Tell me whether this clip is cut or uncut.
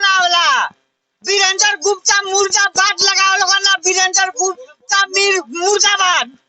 uncut